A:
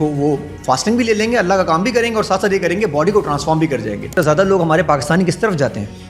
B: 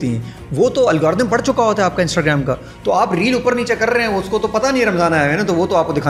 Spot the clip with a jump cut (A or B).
A